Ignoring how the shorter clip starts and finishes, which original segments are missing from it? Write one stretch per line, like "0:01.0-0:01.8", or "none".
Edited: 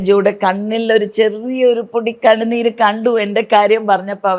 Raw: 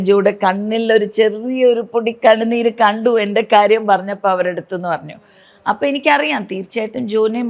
none